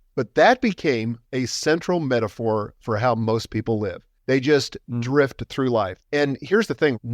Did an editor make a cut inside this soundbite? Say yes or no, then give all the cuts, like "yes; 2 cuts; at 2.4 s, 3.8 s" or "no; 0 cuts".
yes; 3 cuts; at 1.2 s, 4.1 s, 6.0 s